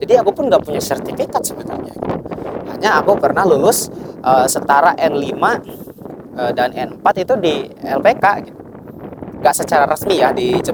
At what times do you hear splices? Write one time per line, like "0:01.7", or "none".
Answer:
none